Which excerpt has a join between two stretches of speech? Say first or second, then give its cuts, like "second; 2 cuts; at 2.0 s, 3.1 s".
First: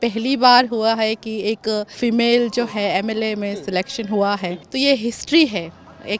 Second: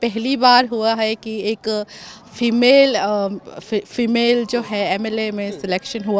first; 2 cuts; at 1.9 s, 4.6 s